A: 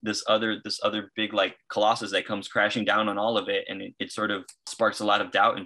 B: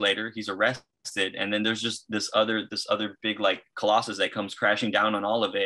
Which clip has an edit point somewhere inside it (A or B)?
A